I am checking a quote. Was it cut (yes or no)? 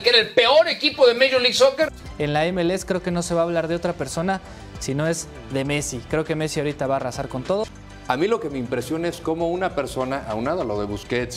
yes